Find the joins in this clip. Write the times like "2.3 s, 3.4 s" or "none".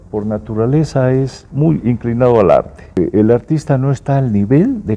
1.4 s, 2.9 s